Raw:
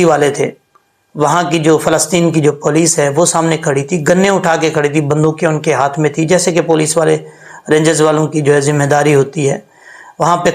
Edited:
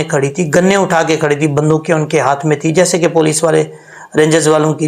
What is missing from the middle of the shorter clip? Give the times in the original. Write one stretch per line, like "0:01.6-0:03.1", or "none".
none